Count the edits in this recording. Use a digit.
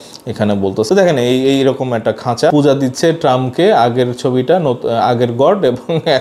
1